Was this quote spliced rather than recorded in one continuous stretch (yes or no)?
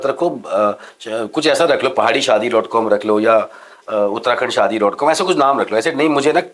no